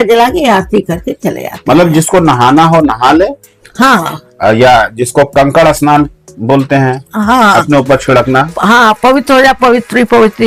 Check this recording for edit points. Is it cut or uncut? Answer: uncut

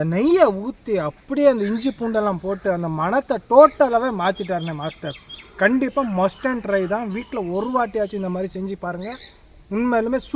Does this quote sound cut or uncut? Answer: uncut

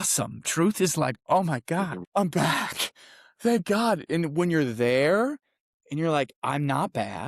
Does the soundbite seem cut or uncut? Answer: cut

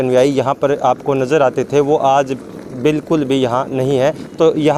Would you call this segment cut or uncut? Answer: uncut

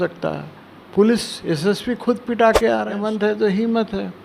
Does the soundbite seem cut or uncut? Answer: cut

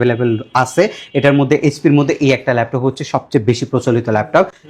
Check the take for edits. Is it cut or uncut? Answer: uncut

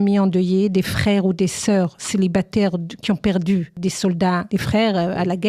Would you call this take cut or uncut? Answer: cut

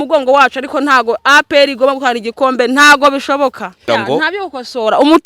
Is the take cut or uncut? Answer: cut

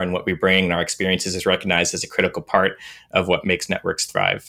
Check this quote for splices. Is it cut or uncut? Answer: cut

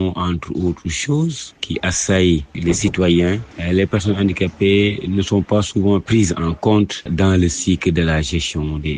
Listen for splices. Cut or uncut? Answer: cut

